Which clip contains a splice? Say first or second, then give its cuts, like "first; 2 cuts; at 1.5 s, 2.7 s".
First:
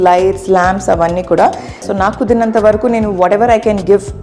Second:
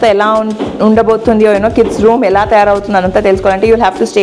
first; 1 cut; at 1.8 s